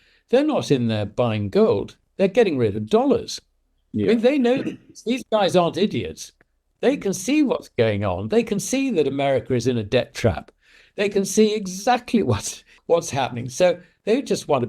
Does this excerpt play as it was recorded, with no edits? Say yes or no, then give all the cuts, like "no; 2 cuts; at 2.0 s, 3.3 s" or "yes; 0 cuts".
no; 1 cut; at 12.7 s